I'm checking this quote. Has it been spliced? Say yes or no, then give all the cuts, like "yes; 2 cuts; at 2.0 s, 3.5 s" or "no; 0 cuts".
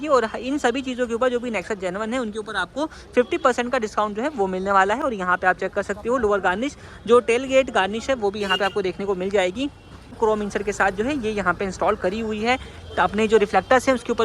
no; 0 cuts